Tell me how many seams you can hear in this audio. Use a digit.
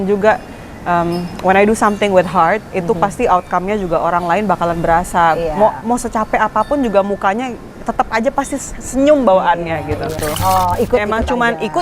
1